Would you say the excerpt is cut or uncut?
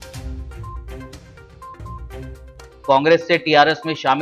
cut